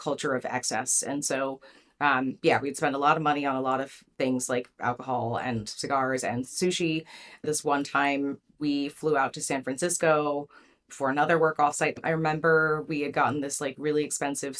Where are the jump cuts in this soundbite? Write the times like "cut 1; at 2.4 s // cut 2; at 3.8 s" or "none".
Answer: cut 1; at 7.4 s // cut 2; at 12.0 s